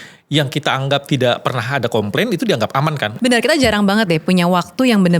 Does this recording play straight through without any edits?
no; 1 cut; at 3.1 s

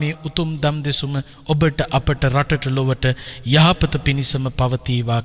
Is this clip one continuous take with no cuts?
yes; 0 cuts

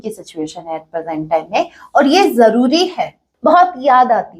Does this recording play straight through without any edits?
no; 1 cut; at 3.2 s

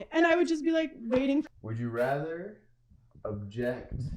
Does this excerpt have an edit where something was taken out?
yes; 1 cut; at 1.6 s

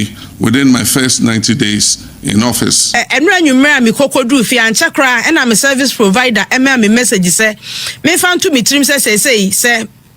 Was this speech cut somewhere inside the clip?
yes; 1 cut; at 3.0 s

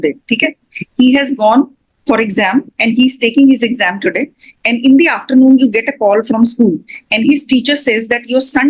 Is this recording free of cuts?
yes; 0 cuts

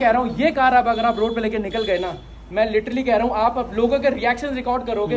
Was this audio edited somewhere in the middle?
no; 0 cuts

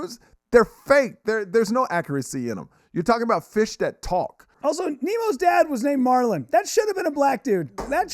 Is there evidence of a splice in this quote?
yes; 1 cut; at 4.5 s

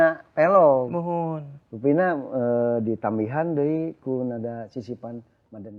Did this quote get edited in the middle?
no; 0 cuts

